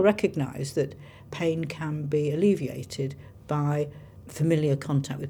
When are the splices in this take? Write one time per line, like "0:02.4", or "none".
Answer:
none